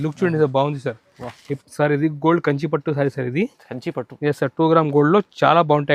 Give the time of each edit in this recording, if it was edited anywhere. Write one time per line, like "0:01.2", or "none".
0:01.5